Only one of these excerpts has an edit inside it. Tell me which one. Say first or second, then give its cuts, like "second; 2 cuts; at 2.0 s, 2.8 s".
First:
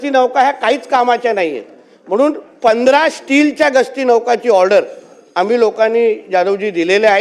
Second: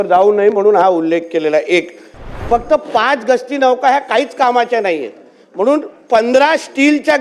second; 1 cut; at 2.3 s